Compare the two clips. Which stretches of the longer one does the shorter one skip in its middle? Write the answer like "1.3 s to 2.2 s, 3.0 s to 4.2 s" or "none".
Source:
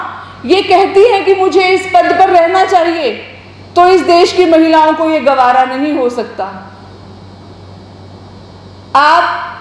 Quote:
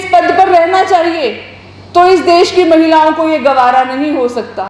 none